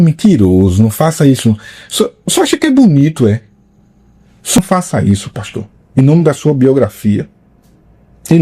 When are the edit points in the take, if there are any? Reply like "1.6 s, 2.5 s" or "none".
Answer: 4.6 s